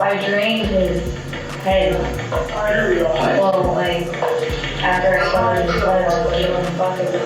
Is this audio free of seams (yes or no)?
yes